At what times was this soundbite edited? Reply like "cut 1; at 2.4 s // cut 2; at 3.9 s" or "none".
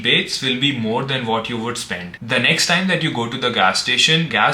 cut 1; at 2.2 s